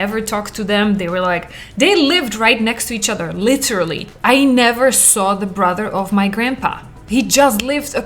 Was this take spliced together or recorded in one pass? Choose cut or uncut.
cut